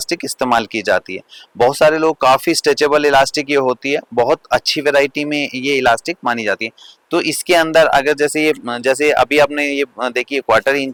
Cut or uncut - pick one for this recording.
uncut